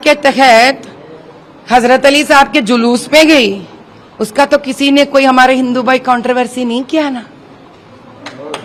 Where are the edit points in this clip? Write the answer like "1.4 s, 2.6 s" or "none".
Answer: none